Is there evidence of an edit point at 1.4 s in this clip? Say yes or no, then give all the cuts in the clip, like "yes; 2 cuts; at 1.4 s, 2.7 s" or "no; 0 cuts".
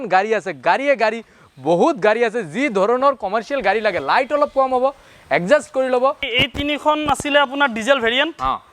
no; 1 cut; at 6.3 s